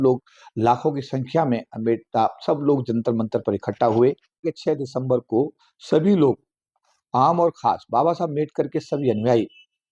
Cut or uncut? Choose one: cut